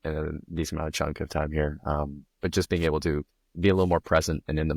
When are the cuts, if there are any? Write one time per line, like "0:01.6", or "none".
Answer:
none